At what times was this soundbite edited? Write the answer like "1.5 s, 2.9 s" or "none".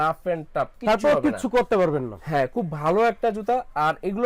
none